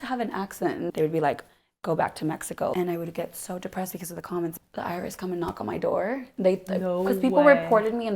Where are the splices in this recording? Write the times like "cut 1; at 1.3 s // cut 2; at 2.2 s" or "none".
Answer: cut 1; at 0.9 s // cut 2; at 2.7 s // cut 3; at 4.5 s